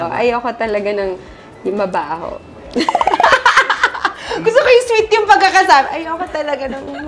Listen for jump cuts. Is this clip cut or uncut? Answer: uncut